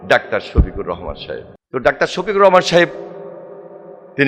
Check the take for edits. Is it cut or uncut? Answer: cut